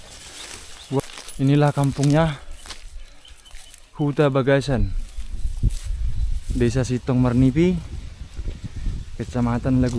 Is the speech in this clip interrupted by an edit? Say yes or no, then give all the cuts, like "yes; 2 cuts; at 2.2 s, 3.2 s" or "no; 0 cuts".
yes; 1 cut; at 1.0 s